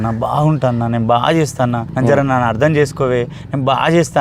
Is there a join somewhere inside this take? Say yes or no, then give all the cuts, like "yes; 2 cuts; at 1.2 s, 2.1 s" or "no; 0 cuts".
yes; 1 cut; at 1.9 s